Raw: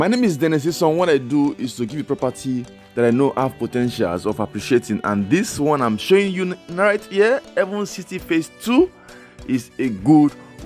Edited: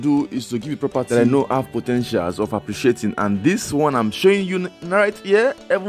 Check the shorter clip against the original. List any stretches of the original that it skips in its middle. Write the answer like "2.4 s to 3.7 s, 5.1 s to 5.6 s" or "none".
2.3 s to 2.9 s